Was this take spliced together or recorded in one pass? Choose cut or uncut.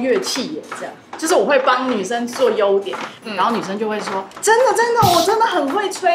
uncut